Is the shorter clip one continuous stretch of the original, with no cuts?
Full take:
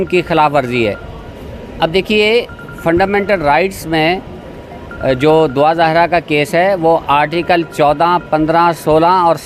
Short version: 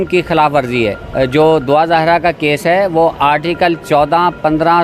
no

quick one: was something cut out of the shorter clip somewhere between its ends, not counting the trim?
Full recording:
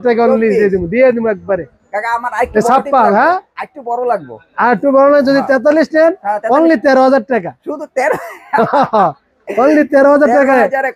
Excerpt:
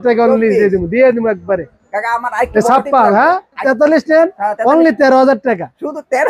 yes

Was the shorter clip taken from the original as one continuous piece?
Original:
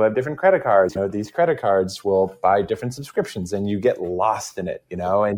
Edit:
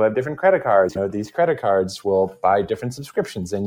yes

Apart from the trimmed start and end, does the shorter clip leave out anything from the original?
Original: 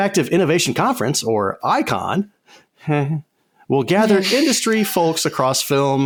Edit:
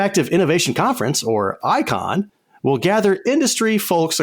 yes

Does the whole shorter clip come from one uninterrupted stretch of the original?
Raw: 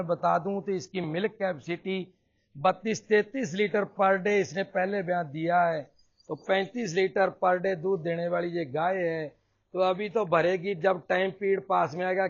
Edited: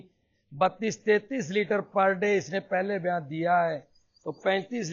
yes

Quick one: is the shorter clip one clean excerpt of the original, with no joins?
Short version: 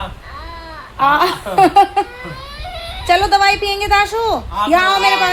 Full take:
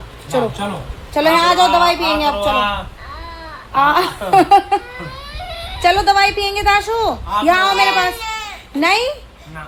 yes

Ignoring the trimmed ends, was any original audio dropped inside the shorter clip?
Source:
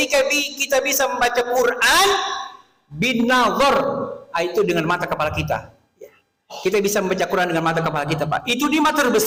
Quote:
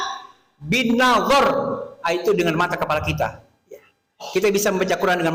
no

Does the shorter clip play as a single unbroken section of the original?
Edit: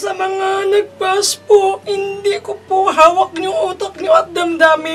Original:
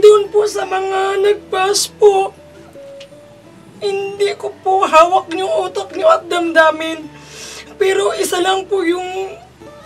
no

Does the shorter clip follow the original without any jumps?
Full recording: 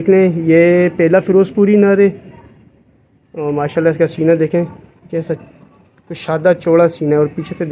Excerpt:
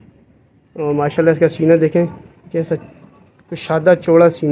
yes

